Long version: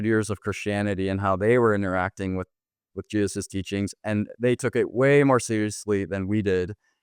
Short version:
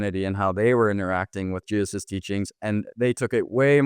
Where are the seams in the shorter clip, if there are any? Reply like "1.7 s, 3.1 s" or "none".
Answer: 1.6 s

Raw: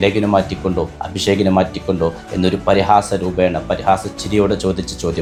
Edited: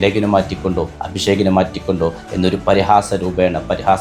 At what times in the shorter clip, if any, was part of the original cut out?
none

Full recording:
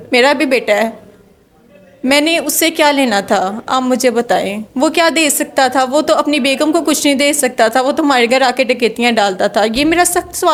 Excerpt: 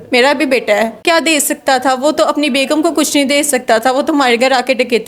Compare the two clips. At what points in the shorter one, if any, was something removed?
1.0 s

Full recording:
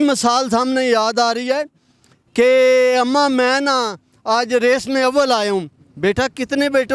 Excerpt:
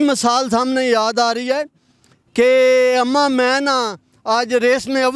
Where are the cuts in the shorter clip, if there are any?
none

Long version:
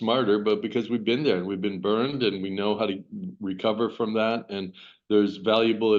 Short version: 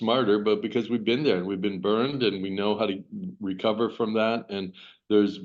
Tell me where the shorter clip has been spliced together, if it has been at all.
none

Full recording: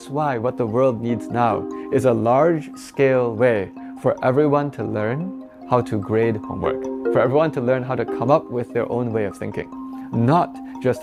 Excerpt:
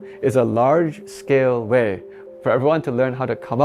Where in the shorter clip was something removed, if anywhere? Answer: 2.2 s

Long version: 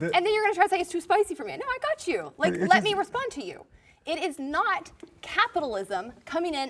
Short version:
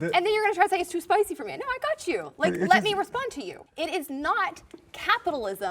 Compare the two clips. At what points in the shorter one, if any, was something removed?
3.6 s

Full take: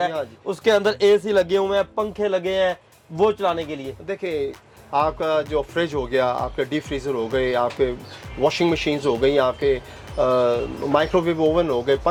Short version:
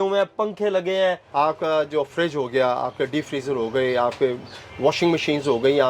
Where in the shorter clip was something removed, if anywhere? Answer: 1.2 s

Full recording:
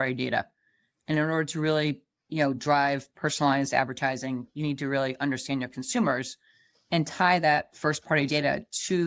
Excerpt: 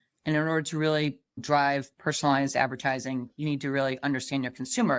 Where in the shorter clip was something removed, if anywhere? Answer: 1.4 s

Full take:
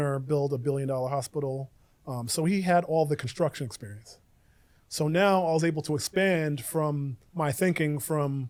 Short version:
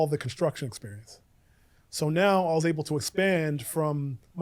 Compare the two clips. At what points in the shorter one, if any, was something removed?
none

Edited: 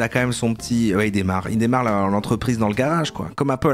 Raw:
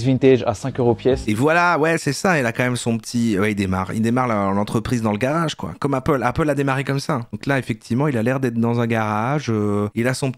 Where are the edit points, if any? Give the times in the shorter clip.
none

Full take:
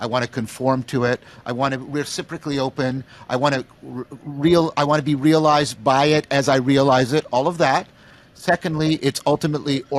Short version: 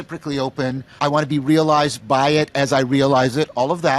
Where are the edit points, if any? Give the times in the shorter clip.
1.0 s

